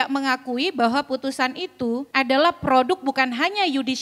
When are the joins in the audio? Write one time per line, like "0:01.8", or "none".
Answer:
0:02.1